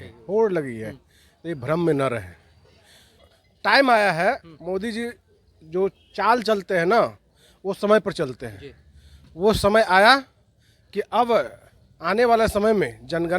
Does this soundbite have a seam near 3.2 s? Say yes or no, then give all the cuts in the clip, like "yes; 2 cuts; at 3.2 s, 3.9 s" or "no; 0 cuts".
yes; 1 cut; at 3.2 s